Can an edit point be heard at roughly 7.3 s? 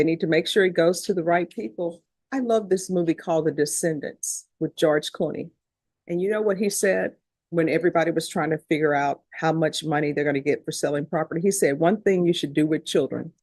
no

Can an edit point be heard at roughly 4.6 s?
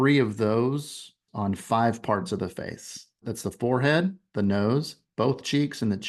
no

